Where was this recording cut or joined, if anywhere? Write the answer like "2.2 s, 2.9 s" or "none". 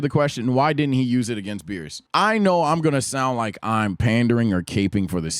none